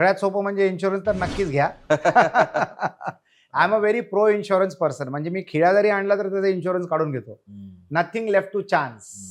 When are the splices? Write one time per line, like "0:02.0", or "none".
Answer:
none

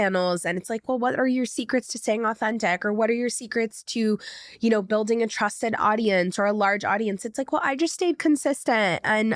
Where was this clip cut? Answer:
none

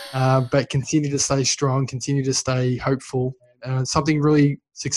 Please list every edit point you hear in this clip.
0:03.5

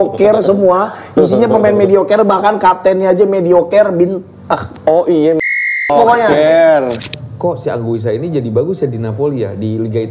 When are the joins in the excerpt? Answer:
0:07.0

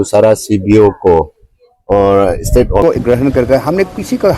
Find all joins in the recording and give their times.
0:02.8

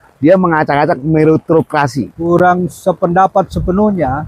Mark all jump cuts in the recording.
0:02.2

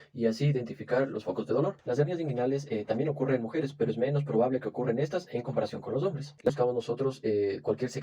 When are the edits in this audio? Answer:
0:01.8
0:06.5

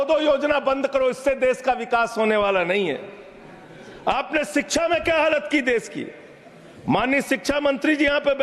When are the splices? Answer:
none

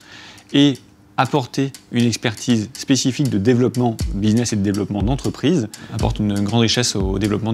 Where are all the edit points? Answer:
0:05.9

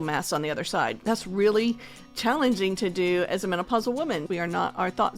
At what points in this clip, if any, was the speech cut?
0:01.0
0:04.2

